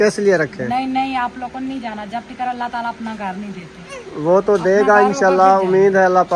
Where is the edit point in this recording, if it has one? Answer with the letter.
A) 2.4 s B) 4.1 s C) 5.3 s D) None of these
D